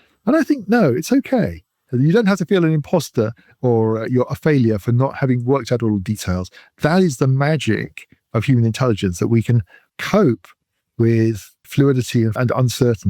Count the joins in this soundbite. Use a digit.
3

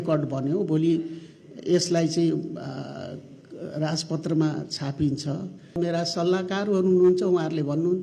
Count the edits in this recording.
1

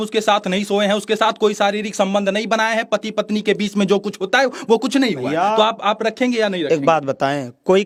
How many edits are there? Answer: 0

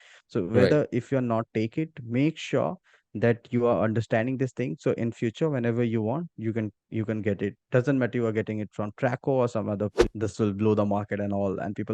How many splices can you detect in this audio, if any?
1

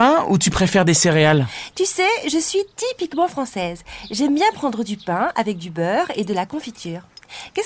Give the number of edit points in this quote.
1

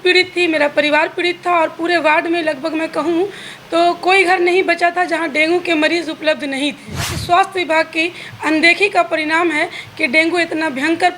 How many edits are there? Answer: 1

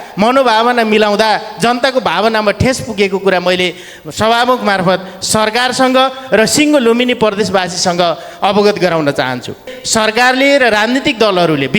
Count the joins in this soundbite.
1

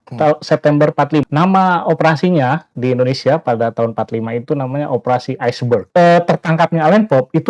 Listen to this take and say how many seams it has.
2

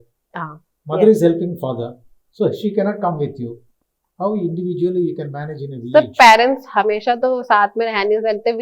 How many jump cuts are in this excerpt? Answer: 0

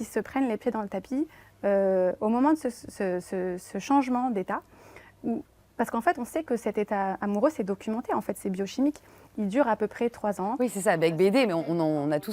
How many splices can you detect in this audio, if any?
0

